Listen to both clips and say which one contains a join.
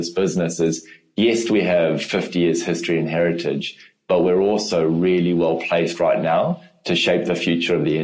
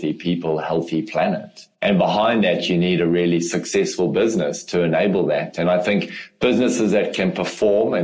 second; 1 cut; at 1.7 s

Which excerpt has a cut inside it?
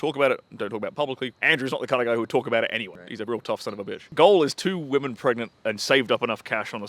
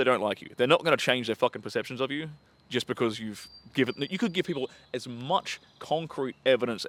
first; 4 cuts; at 1.4 s, 3.0 s, 4.1 s, 5.6 s

